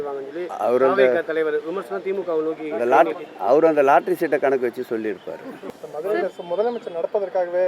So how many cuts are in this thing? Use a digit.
1